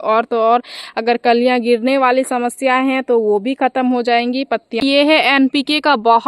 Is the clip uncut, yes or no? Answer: no